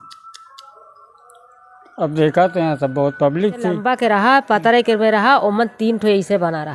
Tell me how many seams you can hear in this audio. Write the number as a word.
one